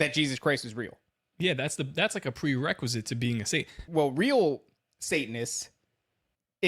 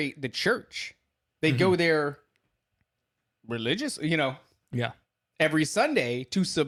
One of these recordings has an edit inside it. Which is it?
first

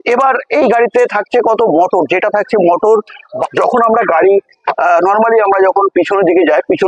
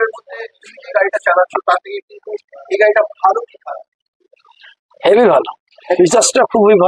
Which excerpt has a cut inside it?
first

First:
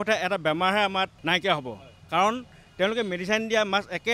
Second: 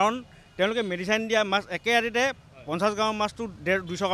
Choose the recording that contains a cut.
first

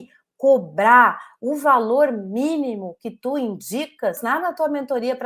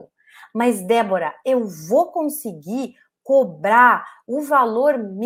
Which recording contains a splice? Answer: first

